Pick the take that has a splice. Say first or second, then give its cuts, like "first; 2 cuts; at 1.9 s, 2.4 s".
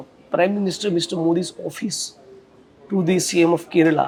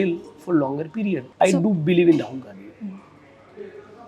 second; 1 cut; at 1.3 s